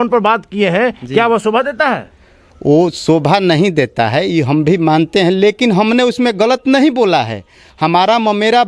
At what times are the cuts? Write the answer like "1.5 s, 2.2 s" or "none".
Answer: none